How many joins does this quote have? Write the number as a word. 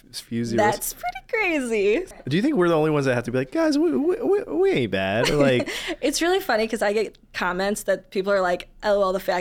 one